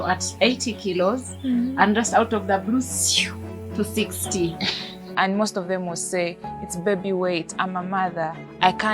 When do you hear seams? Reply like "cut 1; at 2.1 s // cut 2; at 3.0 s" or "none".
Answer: cut 1; at 5.0 s